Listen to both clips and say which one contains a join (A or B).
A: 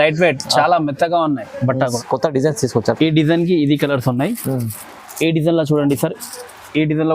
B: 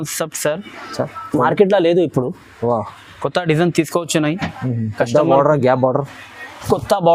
A